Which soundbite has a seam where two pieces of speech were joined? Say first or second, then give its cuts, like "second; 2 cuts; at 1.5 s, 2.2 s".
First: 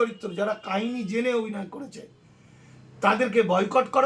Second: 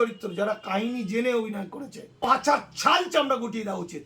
second; 1 cut; at 2.2 s